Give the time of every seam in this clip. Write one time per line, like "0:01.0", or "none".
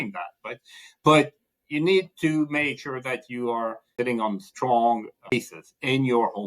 0:03.8
0:05.3